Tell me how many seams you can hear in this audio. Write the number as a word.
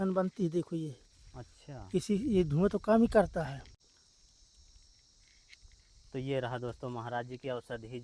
one